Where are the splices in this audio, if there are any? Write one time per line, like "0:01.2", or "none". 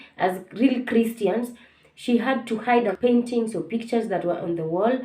0:02.9